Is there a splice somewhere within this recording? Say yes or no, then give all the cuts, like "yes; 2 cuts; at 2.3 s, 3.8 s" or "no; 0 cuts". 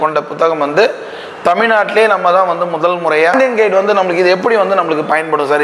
yes; 1 cut; at 3.3 s